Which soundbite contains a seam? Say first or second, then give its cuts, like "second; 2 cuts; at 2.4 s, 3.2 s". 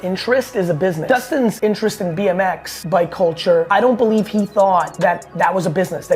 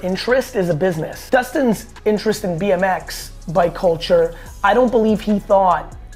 first; 4 cuts; at 1.3 s, 2.7 s, 3.7 s, 4.9 s